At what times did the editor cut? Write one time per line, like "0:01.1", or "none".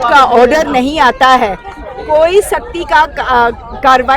none